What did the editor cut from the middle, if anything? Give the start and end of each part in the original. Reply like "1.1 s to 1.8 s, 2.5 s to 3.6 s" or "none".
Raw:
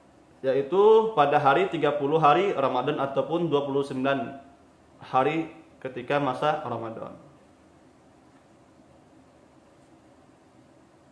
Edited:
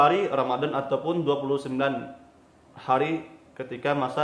none